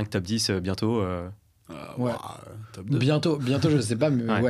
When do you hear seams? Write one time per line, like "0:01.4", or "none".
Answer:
none

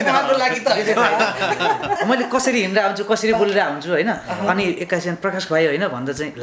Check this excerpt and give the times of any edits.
0:02.0

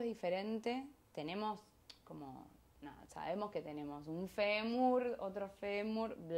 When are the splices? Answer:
none

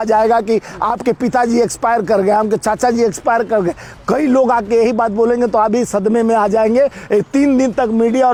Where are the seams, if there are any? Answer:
none

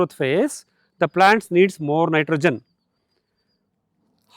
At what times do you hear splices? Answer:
none

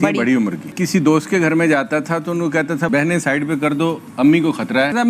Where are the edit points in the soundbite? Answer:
none

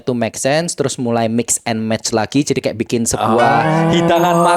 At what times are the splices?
none

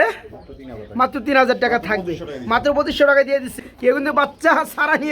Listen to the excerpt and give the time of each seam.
0:03.5

